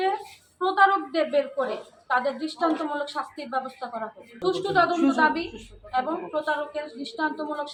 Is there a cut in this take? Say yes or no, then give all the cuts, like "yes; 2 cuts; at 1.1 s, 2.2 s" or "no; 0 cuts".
no; 0 cuts